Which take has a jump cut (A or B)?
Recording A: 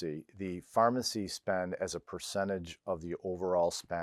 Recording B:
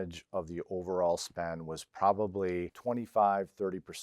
B